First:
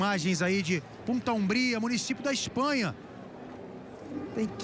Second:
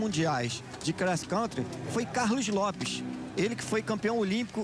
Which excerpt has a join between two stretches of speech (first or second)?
second